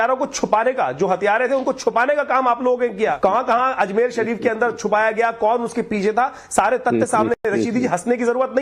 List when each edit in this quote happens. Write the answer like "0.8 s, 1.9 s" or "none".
3.2 s